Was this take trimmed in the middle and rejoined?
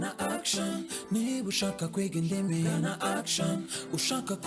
no; 0 cuts

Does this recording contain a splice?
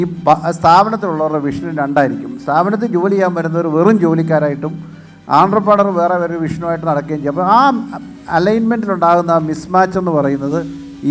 no; 0 cuts

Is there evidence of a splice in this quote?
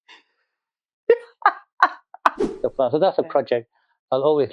yes; 1 cut; at 2.5 s

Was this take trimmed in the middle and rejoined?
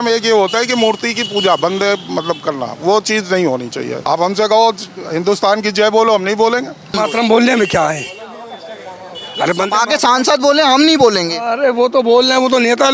yes; 2 cuts; at 4.0 s, 6.9 s

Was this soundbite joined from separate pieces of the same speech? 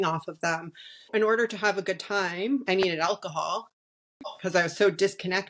yes; 1 cut; at 1.1 s

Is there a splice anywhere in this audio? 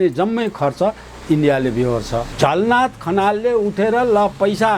yes; 1 cut; at 2.3 s

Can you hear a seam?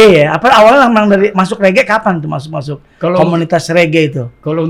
no; 0 cuts

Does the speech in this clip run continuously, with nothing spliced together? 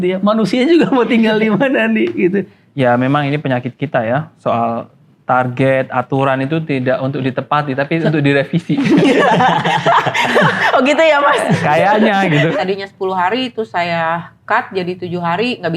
no; 2 cuts; at 2.6 s, 12.5 s

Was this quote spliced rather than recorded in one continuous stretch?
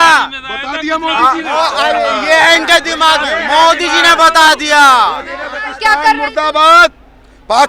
yes; 2 cuts; at 1.5 s, 5.6 s

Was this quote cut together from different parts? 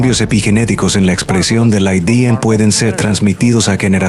no; 0 cuts

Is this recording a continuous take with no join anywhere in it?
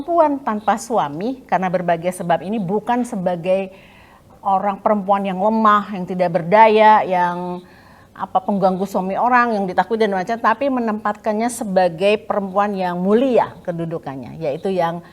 yes; 0 cuts

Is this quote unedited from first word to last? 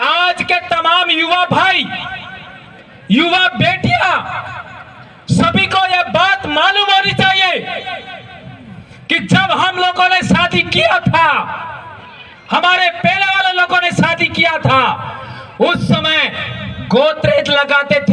yes; 0 cuts

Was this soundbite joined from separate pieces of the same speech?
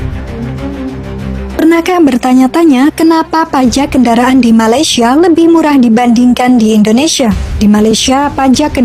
no; 0 cuts

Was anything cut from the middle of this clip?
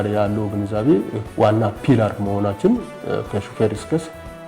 yes; 1 cut; at 1.2 s

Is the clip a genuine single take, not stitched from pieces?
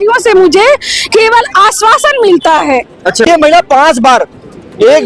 no; 1 cut; at 3.3 s

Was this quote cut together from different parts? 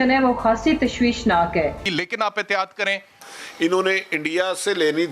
yes; 1 cut; at 1.8 s

